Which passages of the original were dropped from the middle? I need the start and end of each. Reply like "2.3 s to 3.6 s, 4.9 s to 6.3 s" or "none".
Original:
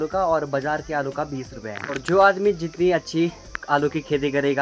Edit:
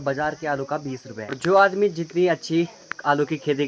1.7 s to 1.9 s